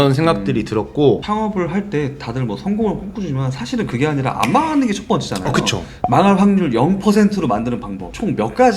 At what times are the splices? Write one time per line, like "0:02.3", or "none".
0:01.2